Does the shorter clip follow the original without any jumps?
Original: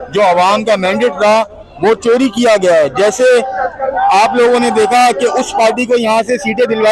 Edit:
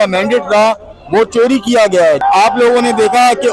no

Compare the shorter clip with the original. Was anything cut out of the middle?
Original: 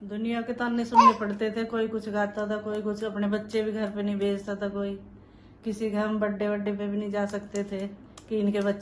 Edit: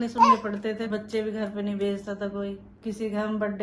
yes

